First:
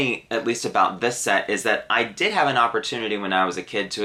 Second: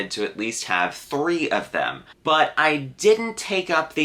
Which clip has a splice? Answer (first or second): second